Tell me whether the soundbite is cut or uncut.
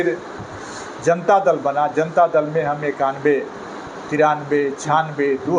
uncut